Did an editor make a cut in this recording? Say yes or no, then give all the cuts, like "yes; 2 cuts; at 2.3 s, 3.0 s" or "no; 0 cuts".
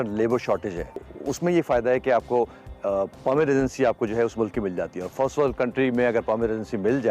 yes; 1 cut; at 1.1 s